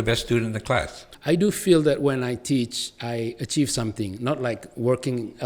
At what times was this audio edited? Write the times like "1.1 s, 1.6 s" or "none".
1.1 s